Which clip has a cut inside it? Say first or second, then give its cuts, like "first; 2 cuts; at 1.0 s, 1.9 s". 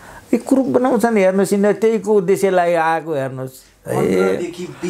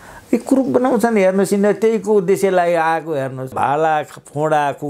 second; 1 cut; at 3.5 s